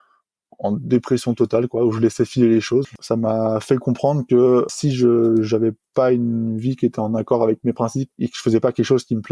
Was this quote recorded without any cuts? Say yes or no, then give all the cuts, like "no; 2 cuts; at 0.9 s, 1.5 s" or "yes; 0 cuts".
no; 3 cuts; at 2.9 s, 4.7 s, 8.1 s